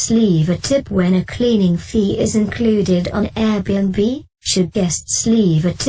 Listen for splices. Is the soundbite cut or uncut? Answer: cut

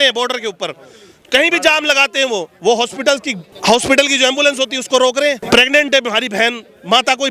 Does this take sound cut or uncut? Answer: cut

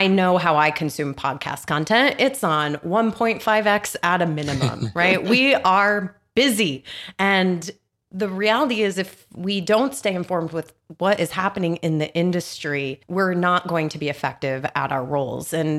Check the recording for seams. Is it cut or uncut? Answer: uncut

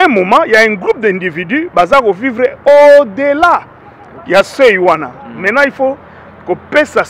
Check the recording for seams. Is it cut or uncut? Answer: uncut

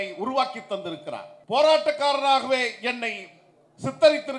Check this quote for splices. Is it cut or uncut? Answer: cut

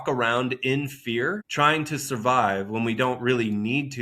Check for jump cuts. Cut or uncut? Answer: cut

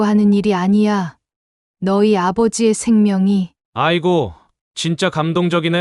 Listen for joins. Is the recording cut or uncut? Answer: uncut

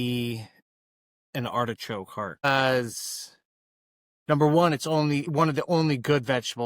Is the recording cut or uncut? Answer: cut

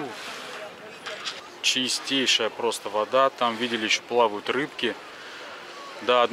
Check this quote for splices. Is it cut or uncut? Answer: cut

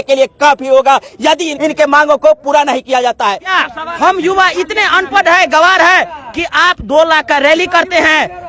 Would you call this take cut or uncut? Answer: cut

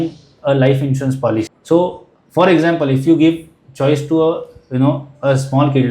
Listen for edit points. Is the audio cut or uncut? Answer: cut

